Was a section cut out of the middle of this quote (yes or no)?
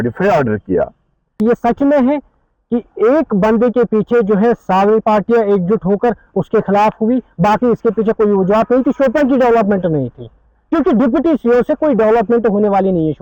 yes